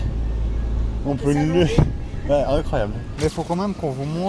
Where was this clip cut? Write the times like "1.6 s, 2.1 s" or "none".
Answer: 3.1 s